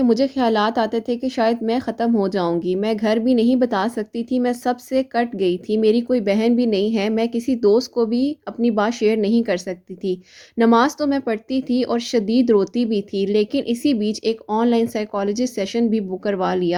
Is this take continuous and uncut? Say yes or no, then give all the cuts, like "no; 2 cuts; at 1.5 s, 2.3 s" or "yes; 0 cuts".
yes; 0 cuts